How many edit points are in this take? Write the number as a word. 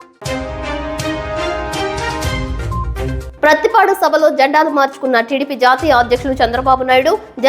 one